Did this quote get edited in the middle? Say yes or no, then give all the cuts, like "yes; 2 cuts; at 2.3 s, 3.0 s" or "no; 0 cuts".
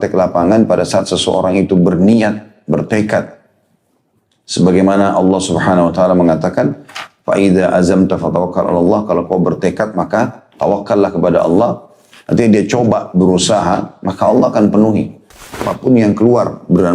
yes; 1 cut; at 15.6 s